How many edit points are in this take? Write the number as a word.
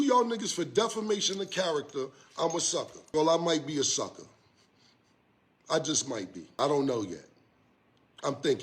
two